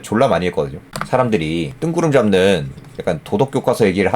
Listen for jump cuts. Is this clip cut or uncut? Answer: cut